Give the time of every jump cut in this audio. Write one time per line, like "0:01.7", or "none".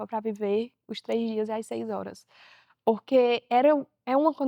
none